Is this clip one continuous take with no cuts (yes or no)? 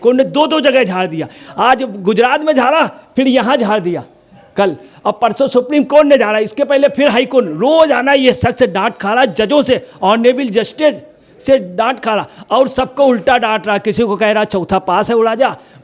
yes